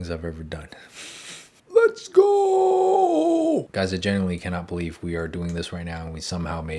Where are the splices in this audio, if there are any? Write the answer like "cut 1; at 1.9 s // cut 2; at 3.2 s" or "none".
none